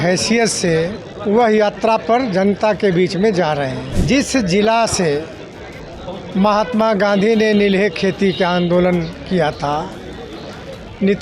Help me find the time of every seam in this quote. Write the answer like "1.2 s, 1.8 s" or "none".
1.1 s, 3.9 s